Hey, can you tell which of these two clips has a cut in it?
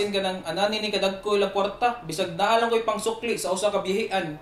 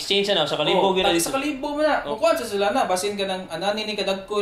second; 1 cut; at 2.1 s

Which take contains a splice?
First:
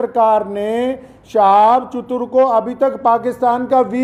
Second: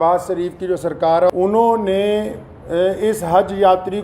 second; 1 cut; at 1.3 s

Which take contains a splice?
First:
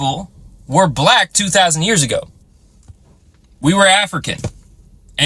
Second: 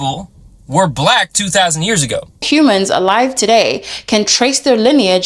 second; 1 cut; at 2.4 s

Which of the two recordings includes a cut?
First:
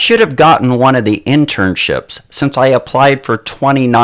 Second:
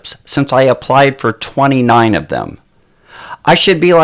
second; 1 cut; at 3.0 s

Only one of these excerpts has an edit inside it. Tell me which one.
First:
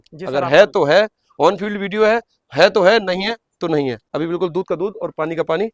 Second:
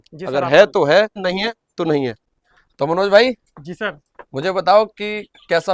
second; 2 cuts; at 1.2 s, 2.2 s

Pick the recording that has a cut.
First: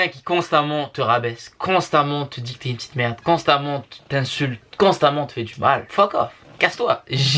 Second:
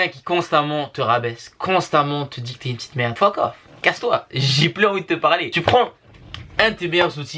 second; 2 cuts; at 3.1 s, 5.6 s

